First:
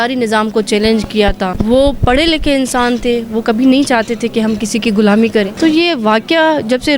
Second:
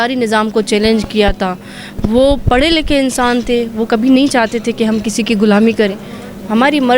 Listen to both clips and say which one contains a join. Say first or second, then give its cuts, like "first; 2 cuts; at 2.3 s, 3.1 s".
first; 2 cuts; at 1.5 s, 5.5 s